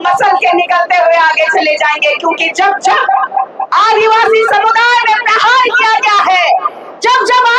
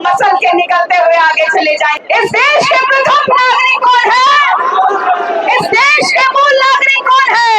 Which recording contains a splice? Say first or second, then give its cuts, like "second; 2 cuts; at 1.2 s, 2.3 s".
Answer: second; 1 cut; at 2.0 s